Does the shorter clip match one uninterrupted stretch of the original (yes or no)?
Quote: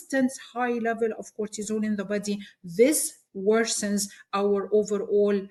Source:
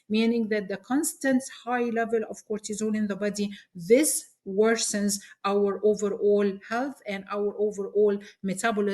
yes